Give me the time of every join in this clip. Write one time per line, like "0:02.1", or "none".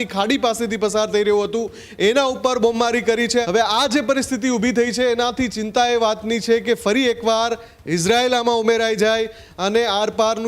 0:03.4